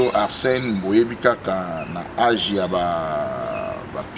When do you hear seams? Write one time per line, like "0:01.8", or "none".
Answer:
none